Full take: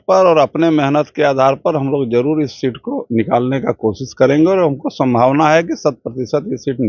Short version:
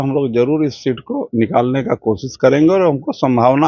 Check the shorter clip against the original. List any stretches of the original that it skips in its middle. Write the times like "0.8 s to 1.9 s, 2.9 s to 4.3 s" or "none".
none